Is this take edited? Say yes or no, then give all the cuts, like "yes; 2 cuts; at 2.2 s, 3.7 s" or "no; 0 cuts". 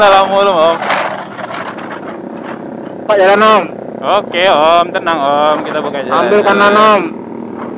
yes; 1 cut; at 1.6 s